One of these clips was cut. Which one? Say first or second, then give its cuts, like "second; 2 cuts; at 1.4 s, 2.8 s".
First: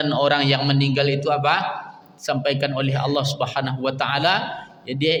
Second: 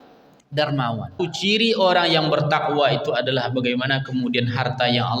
second; 1 cut; at 1.2 s